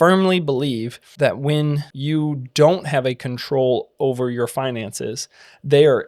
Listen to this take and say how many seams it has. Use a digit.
2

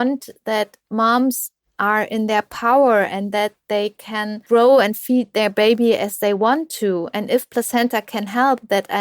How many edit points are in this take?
1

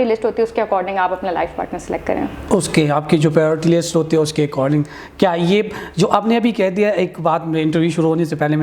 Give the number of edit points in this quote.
0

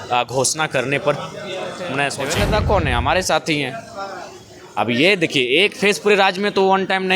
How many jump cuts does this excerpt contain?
1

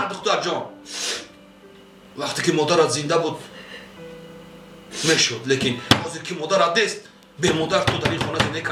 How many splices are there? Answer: 0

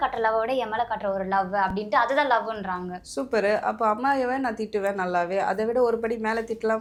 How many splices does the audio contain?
0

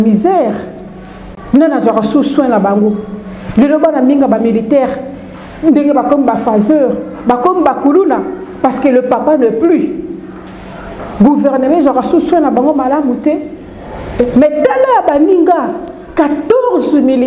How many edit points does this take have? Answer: 0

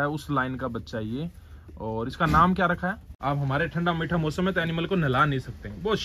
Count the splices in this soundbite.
1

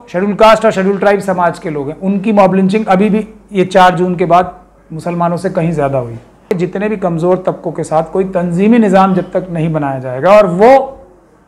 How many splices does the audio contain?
1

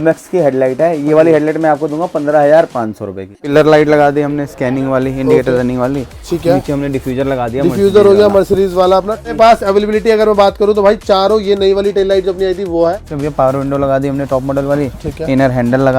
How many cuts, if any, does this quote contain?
3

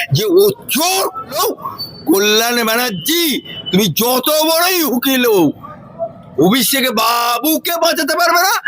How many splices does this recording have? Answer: 1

